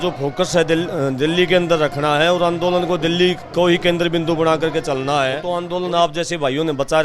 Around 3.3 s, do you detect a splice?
no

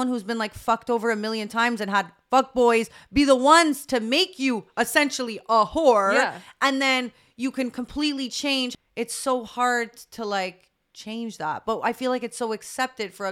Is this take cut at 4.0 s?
no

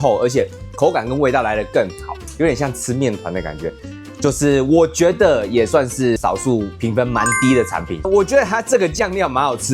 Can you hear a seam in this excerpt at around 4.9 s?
no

